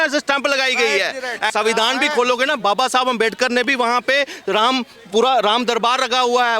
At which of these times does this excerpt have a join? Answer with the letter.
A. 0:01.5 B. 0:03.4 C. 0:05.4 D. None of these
A